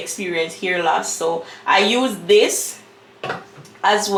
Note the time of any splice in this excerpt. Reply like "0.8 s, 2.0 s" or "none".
none

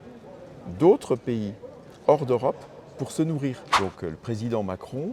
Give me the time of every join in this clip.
3.6 s

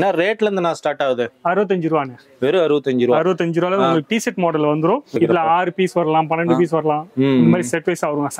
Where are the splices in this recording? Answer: 5.1 s

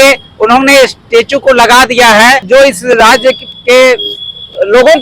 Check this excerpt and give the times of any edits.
2.4 s

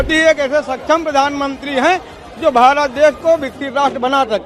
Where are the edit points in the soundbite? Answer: none

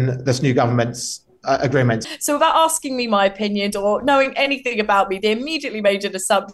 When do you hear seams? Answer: 2.0 s

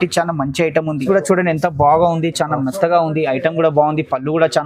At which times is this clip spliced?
1.0 s

